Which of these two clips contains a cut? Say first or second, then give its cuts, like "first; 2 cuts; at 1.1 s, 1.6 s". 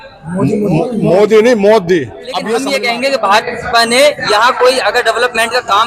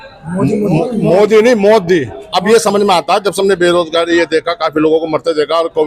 first; 1 cut; at 2.5 s